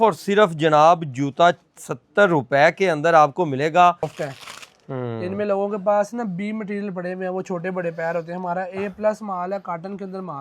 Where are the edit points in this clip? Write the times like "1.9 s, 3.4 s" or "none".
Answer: 4.1 s